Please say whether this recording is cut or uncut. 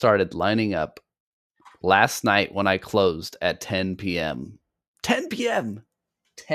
uncut